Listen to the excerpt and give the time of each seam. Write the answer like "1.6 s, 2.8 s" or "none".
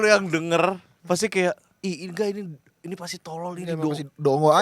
0.9 s, 1.7 s